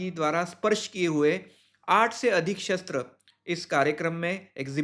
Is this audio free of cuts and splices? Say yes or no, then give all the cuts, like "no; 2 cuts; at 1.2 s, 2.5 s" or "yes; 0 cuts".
yes; 0 cuts